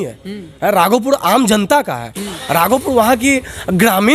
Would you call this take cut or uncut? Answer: uncut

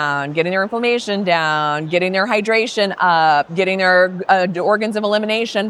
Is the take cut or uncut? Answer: uncut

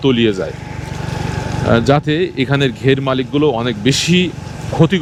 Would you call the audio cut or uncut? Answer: uncut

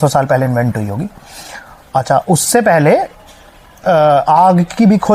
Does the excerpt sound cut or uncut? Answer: uncut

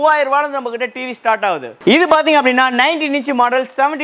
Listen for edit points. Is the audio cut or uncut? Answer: cut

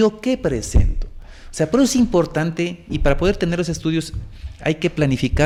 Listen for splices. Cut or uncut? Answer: uncut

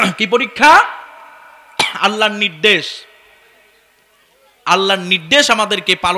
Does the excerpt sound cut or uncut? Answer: uncut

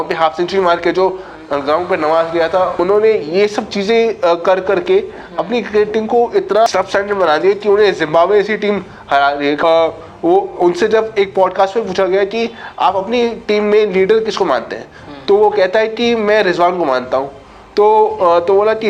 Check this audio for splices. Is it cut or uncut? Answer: cut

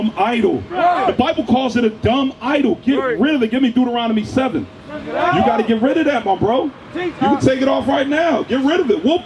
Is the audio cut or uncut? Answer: uncut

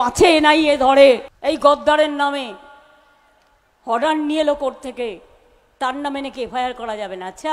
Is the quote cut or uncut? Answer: cut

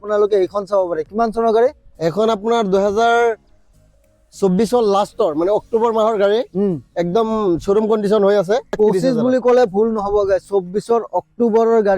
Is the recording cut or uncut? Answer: cut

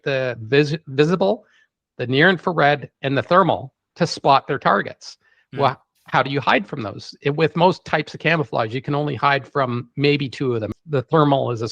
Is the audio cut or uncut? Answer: cut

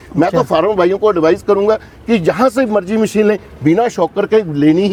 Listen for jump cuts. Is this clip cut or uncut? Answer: uncut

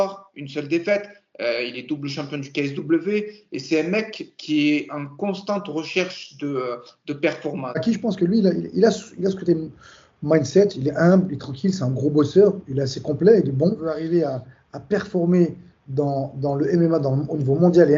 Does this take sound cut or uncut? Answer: cut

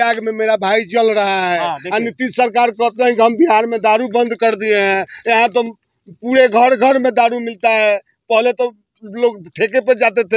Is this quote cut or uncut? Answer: uncut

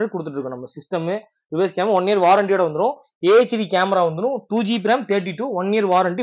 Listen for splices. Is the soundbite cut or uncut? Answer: uncut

